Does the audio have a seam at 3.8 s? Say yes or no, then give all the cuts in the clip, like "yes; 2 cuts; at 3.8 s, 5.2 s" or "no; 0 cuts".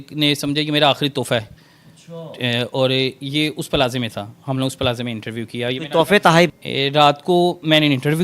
no; 1 cut; at 6.5 s